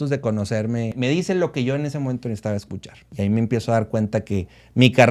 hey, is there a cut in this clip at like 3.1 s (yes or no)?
yes